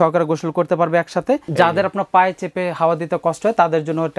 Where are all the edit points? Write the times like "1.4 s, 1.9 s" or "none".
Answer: 1.5 s